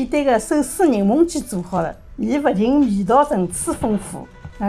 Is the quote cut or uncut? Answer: uncut